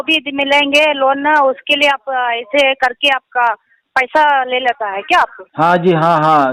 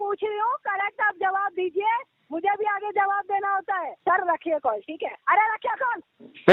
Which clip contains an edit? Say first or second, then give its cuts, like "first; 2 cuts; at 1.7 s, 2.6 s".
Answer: second; 1 cut; at 4.0 s